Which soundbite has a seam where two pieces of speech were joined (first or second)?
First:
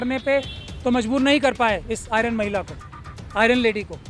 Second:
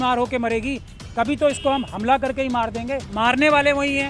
second